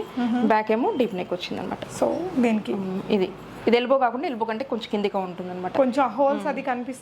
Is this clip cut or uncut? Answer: uncut